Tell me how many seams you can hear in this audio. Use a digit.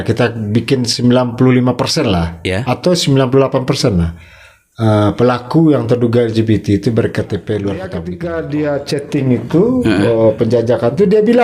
1